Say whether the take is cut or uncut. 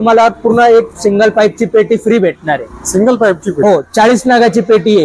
uncut